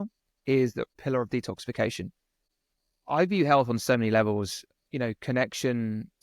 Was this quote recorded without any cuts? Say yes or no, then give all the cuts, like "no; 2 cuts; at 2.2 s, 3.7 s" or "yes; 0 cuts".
no; 2 cuts; at 0.9 s, 2.5 s